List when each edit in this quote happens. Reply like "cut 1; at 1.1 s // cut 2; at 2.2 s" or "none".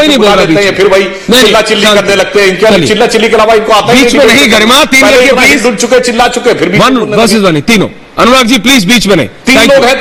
none